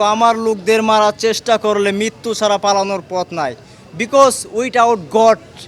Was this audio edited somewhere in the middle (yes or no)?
no